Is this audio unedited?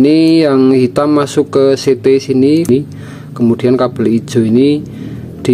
no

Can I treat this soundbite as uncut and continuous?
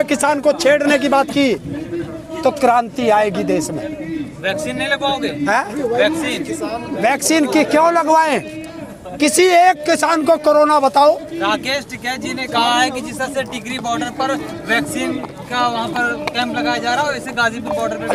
yes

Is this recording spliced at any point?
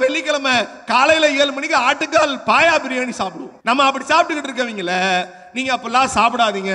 yes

